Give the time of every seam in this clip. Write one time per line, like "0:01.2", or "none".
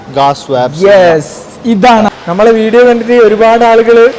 0:02.1